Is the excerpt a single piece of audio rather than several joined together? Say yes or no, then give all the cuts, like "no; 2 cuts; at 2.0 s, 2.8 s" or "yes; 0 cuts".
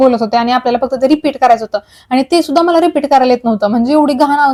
yes; 0 cuts